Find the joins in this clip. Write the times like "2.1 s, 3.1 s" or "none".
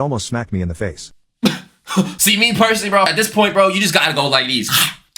2.1 s, 3.1 s